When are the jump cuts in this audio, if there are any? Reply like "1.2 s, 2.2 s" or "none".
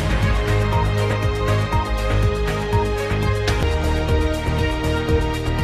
none